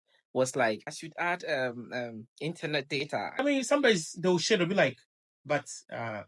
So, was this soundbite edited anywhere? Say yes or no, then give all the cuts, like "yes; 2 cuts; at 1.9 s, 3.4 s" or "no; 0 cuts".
yes; 2 cuts; at 0.8 s, 3.4 s